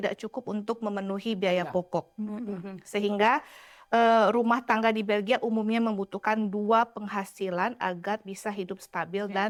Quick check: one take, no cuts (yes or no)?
yes